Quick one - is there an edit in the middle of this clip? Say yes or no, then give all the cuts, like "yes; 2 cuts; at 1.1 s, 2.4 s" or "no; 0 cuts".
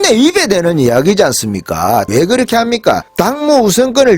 yes; 2 cuts; at 2.1 s, 3.1 s